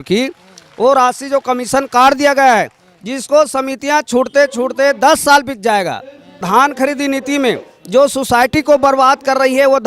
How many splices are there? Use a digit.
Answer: 1